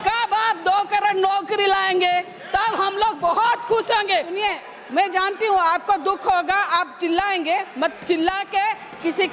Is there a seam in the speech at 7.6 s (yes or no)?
no